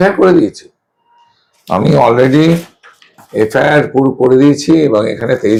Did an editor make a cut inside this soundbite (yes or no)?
no